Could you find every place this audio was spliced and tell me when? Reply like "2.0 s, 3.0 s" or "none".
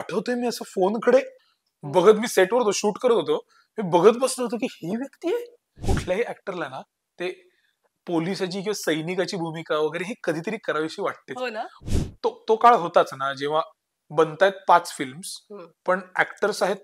5.8 s, 11.8 s